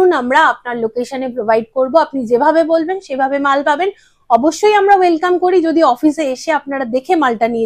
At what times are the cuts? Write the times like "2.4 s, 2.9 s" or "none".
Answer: none